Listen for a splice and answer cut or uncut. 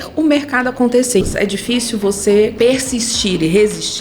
cut